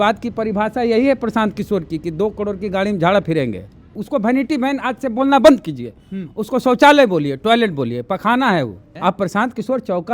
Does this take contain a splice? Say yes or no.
yes